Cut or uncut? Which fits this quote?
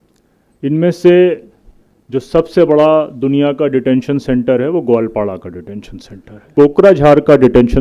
cut